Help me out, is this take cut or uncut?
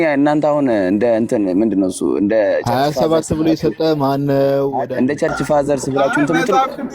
cut